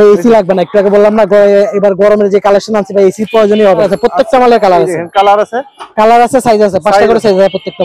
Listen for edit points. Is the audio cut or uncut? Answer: cut